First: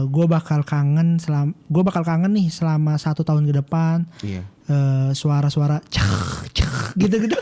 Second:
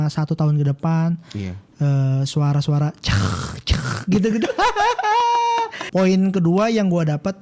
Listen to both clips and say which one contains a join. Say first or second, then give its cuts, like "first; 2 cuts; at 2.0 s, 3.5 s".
second; 1 cut; at 5.8 s